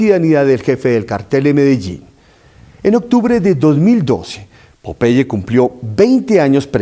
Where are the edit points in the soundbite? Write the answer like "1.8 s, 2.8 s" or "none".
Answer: 3.9 s